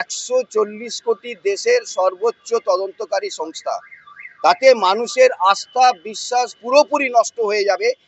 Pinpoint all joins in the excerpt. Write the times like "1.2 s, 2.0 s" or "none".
none